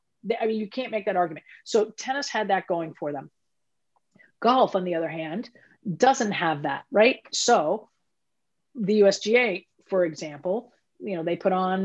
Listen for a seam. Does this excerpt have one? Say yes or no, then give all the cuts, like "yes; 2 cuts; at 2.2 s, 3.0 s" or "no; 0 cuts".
no; 0 cuts